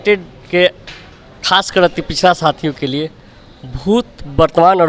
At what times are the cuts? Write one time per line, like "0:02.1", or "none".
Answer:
none